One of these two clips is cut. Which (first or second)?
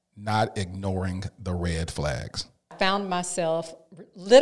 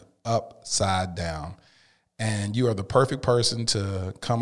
first